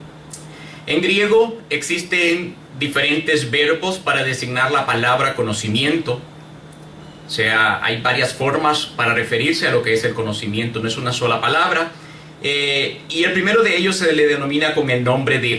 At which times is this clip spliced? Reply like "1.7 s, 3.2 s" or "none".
14.0 s